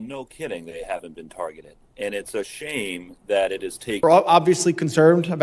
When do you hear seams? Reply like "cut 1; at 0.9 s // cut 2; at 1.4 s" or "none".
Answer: cut 1; at 4.0 s

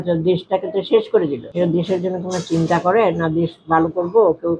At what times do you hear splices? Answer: cut 1; at 1.4 s

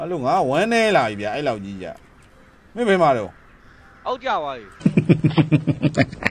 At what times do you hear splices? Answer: cut 1; at 2.0 s // cut 2; at 4.7 s

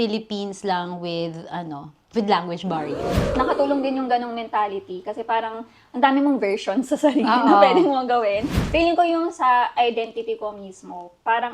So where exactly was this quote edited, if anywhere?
cut 1; at 3.3 s // cut 2; at 8.5 s

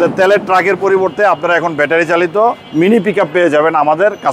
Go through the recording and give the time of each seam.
cut 1; at 2.6 s

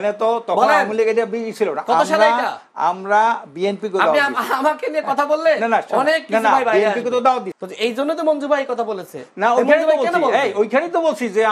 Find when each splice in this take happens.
cut 1; at 7.6 s

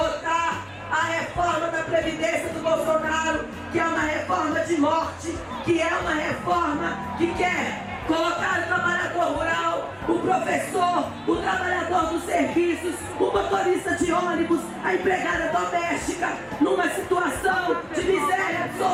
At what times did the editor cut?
none

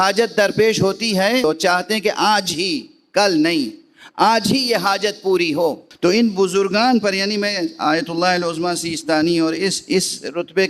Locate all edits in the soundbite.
cut 1; at 1.4 s // cut 2; at 5.9 s

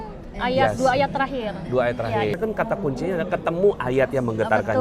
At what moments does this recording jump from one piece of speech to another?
cut 1; at 2.4 s

